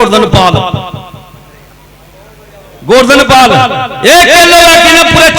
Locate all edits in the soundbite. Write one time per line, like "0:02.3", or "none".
none

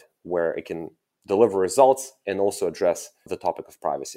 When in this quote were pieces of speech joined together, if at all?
0:03.1

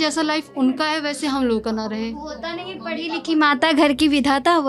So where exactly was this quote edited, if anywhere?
none

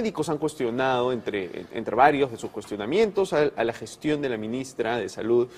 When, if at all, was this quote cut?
0:03.7

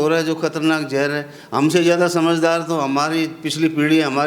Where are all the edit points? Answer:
none

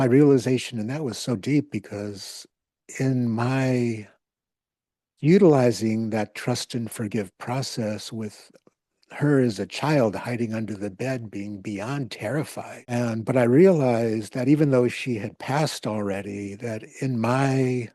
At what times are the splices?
0:12.9

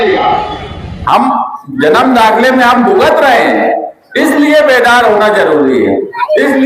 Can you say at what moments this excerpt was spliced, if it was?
0:01.0

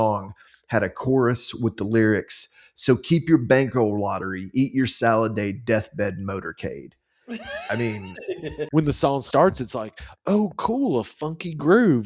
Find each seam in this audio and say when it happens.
0:08.7

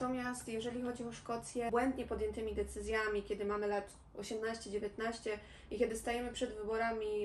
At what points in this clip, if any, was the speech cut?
0:01.7

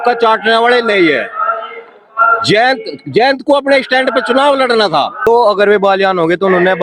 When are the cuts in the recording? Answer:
0:05.3

